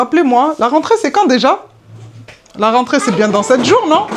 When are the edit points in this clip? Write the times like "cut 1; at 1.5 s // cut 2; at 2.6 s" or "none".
none